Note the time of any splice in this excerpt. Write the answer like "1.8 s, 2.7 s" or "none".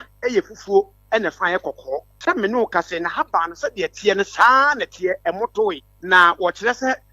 2.1 s, 5.9 s

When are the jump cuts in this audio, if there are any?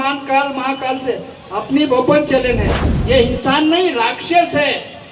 2.8 s

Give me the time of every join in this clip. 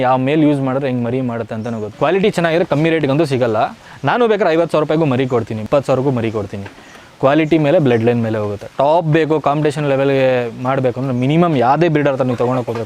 1.8 s, 5.6 s

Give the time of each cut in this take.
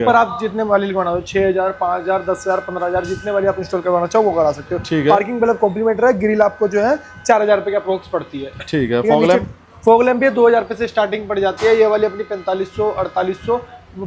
none

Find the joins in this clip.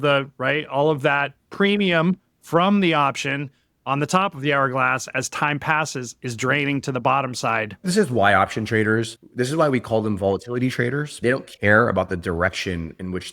7.8 s, 9.2 s, 11.1 s

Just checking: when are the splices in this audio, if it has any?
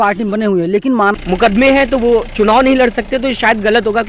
1.1 s

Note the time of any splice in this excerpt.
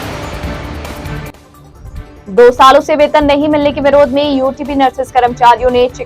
1.5 s

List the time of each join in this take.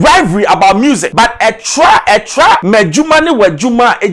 1.1 s, 2.6 s

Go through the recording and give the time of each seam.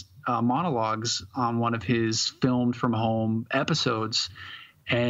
none

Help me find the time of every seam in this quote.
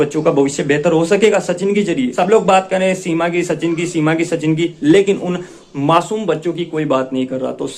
2.1 s

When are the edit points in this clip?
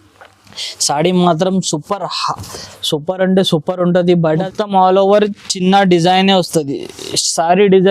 4.4 s

